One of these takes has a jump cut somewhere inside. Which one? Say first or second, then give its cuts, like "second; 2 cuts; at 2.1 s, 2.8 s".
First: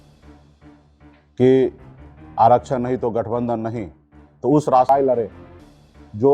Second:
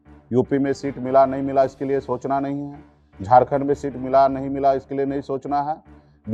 first; 1 cut; at 4.9 s